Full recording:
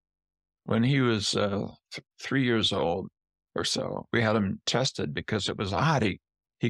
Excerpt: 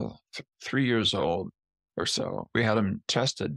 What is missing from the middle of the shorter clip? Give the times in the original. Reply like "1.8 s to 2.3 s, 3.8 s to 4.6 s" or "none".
none